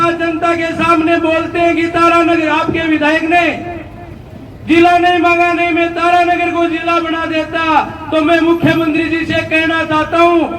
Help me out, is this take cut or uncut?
uncut